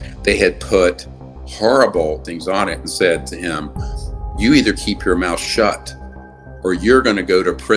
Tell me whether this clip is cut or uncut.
uncut